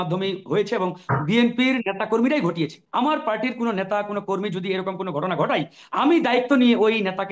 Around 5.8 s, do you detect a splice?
no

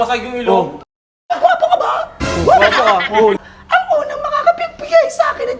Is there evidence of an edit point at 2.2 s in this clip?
no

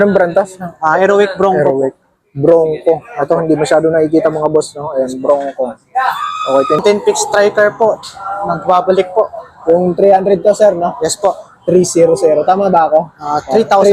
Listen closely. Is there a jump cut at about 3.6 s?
no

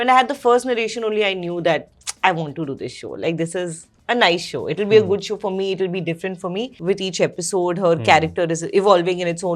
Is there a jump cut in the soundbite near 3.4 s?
no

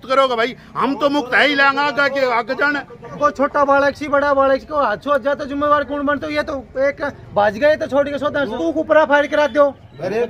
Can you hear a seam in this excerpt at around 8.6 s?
yes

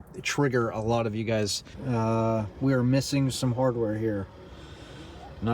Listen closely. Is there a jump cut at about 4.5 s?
no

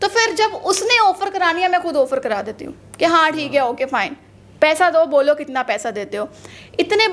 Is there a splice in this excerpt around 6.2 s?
no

